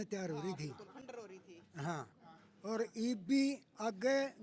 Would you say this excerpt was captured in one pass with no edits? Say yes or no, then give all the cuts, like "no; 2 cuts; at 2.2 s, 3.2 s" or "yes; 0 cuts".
yes; 0 cuts